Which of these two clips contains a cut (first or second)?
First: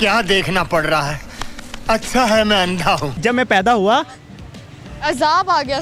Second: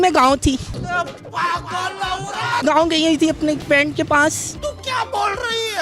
second